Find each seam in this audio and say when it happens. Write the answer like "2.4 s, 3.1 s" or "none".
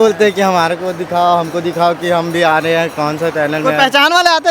none